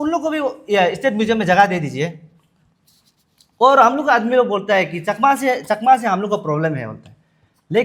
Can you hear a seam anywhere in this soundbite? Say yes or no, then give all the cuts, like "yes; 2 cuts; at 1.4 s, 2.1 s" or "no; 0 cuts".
no; 0 cuts